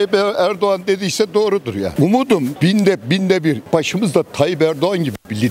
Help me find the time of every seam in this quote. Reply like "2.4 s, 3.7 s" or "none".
none